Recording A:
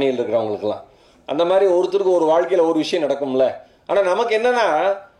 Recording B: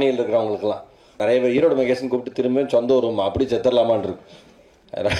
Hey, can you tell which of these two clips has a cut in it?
B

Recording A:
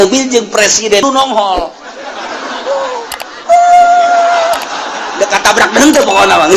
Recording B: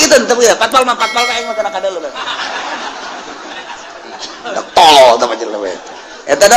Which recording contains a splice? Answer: A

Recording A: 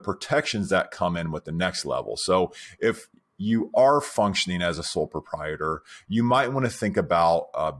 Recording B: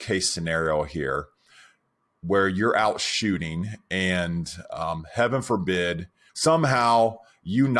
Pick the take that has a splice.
B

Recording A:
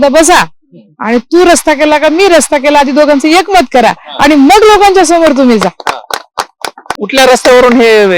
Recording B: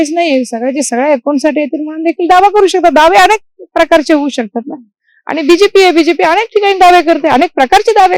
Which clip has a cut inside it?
A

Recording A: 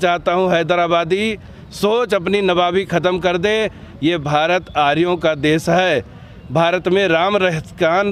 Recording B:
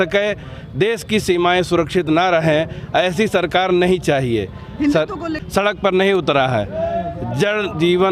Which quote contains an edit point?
B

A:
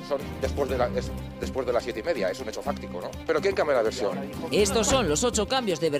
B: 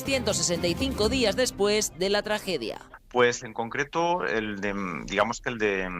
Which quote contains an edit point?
B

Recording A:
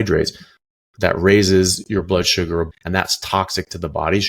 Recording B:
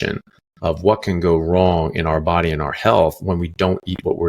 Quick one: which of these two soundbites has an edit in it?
A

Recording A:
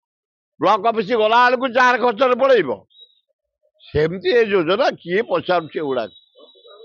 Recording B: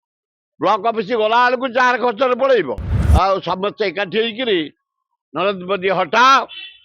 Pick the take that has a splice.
B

